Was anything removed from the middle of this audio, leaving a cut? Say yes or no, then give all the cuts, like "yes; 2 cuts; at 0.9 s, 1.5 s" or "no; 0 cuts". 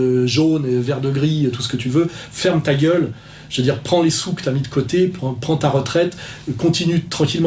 no; 0 cuts